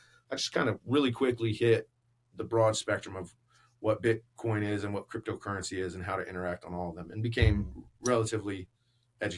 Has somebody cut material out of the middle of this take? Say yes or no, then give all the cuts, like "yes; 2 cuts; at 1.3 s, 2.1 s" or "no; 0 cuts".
no; 0 cuts